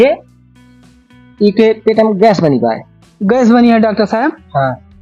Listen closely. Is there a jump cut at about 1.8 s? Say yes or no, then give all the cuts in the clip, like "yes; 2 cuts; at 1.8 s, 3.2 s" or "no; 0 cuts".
no; 1 cut; at 3.1 s